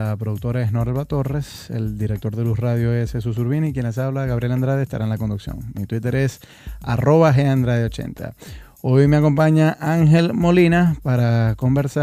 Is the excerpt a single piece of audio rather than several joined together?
no; 1 cut; at 2.3 s

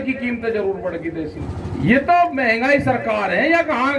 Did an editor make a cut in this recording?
yes; 1 cut; at 1.5 s

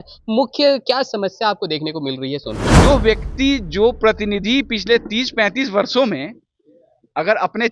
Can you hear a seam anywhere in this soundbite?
yes; 1 cut; at 2.8 s

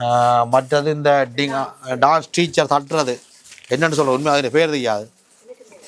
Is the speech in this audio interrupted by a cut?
no; 0 cuts

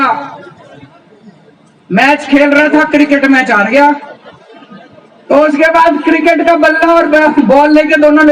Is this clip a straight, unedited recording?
yes; 0 cuts

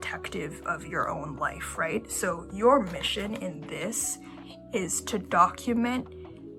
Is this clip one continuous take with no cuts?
yes; 0 cuts

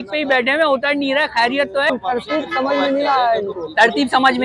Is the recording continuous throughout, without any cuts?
no; 1 cut; at 1.9 s

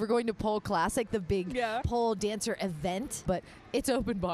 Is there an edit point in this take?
yes; 2 cuts; at 1.8 s, 3.2 s

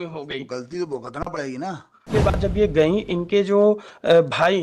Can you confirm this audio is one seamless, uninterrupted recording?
no; 1 cut; at 2.0 s

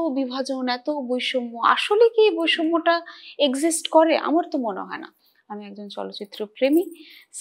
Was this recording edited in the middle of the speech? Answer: yes; 1 cut; at 5.1 s

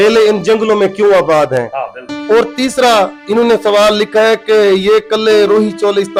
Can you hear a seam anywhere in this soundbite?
no; 0 cuts

